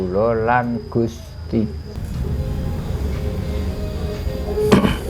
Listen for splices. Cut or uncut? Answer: cut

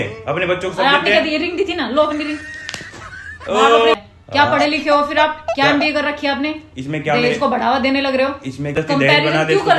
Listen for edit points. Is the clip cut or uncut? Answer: cut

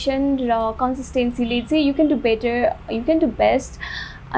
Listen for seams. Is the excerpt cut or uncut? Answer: uncut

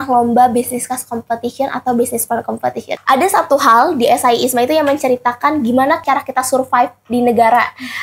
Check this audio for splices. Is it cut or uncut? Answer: cut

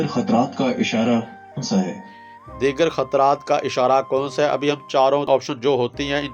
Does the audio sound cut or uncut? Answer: cut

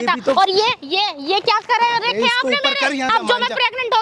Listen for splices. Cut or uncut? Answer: cut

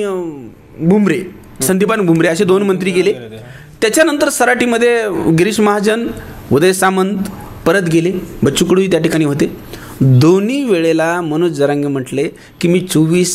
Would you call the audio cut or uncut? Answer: uncut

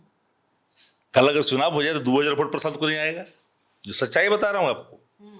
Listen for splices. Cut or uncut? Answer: uncut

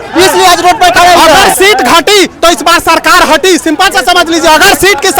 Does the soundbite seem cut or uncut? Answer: cut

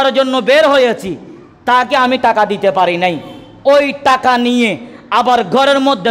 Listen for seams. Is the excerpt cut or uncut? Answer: uncut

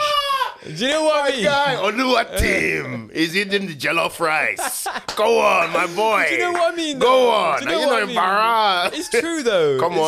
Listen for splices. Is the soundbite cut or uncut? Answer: uncut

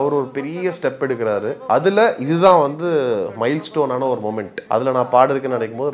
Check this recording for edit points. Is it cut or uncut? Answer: cut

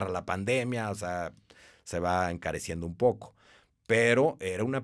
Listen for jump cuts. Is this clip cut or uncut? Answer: uncut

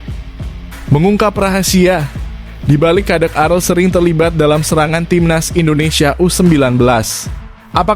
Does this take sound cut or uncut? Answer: cut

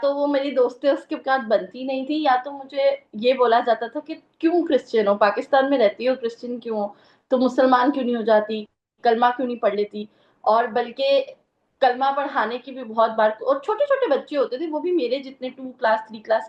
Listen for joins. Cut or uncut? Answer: uncut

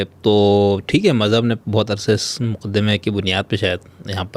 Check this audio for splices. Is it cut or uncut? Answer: uncut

